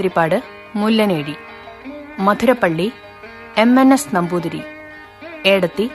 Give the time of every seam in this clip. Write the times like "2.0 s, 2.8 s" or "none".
none